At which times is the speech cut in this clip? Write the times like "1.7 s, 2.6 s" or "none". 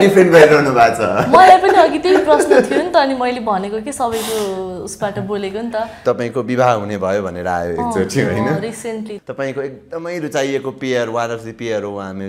6.0 s, 9.1 s